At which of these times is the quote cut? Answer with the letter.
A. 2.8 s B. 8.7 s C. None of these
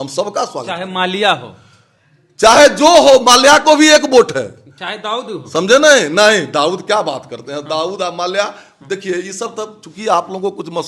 C